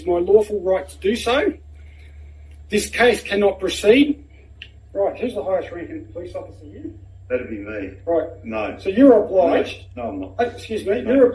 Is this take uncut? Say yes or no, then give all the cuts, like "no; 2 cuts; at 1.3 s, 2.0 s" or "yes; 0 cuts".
yes; 0 cuts